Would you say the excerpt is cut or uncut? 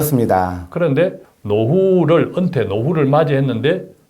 cut